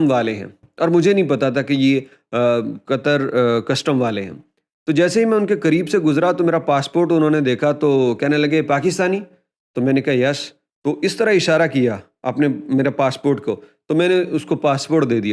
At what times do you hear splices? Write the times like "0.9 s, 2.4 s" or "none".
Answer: none